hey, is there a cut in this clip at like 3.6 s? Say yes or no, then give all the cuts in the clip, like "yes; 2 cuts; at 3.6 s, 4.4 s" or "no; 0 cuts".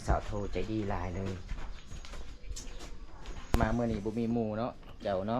yes; 1 cut; at 3.6 s